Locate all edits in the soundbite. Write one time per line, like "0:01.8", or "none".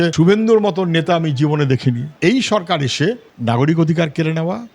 0:02.1